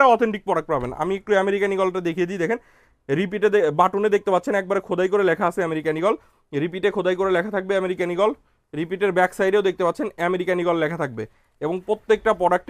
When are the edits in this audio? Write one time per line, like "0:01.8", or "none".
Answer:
none